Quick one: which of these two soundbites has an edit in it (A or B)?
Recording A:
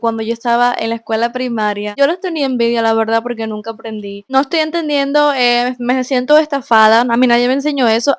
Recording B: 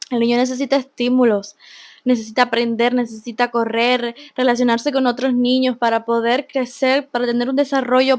A